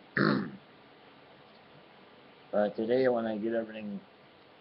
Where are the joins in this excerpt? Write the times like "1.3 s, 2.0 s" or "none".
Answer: 1.8 s